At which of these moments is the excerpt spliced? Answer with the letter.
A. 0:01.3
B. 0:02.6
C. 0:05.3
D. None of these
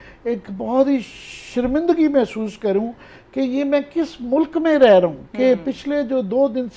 D